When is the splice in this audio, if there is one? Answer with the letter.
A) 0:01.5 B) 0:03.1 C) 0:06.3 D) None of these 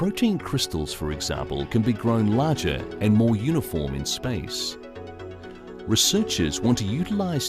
B